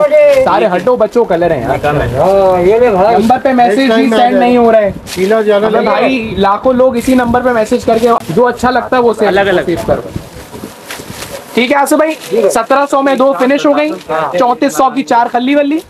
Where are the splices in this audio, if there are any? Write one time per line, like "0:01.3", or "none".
0:08.2